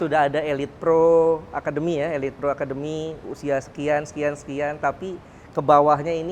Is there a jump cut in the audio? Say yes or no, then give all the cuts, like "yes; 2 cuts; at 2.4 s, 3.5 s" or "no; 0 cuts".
no; 0 cuts